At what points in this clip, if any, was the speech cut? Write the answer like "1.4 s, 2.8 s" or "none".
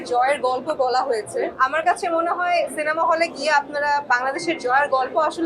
1.5 s